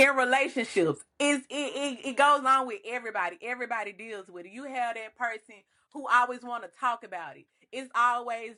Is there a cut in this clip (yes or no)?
no